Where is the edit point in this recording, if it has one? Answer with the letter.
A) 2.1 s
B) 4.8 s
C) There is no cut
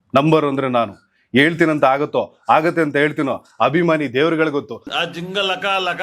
B